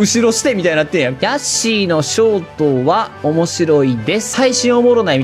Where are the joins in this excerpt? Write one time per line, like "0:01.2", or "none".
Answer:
0:01.2
0:04.3